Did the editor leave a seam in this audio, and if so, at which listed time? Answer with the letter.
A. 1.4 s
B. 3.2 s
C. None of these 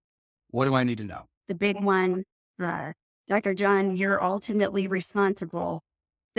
A